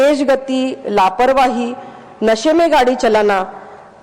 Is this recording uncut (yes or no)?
yes